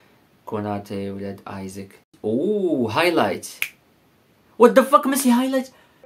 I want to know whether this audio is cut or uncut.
cut